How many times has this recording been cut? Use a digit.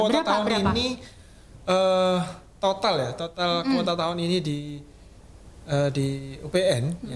0